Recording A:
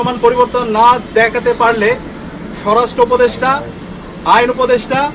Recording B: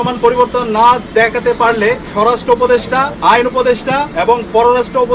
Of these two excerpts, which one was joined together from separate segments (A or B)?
B